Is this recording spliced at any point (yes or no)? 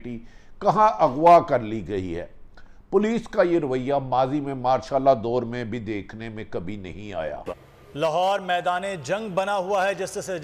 no